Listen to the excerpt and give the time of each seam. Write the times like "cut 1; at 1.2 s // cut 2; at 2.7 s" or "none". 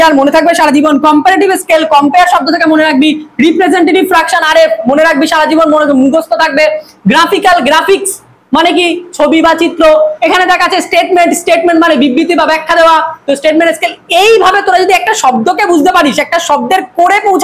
none